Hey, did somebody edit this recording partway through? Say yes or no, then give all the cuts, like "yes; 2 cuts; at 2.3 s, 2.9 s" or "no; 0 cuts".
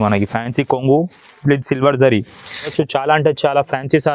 yes; 1 cut; at 2.7 s